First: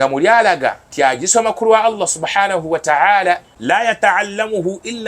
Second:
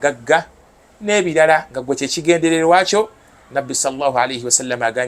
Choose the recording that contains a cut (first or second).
first